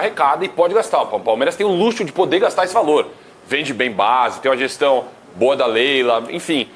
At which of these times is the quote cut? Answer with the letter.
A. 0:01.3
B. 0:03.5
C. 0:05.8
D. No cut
D